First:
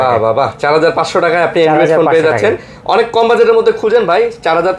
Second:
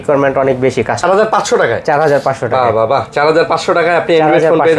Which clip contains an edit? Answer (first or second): second